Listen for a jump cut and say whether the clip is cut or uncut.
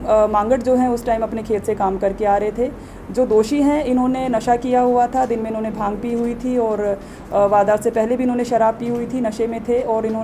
uncut